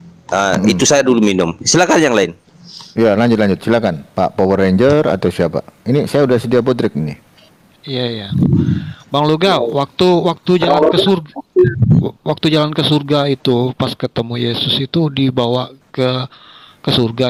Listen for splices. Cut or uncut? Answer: uncut